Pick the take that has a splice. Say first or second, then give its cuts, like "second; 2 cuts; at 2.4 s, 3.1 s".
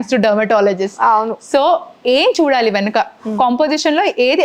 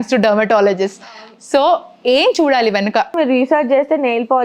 second; 1 cut; at 3.1 s